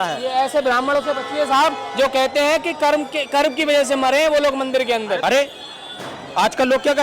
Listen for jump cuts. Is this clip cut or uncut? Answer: cut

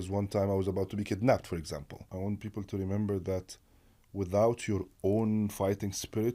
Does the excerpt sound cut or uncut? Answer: cut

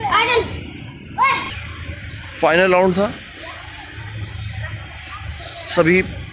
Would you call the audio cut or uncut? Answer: cut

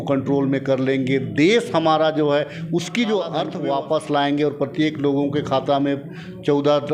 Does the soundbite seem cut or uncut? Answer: cut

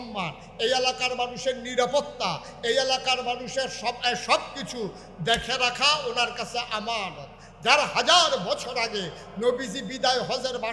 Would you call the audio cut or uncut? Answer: uncut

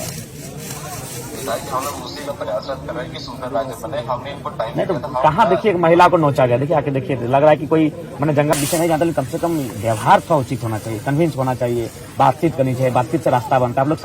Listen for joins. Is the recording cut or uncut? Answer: cut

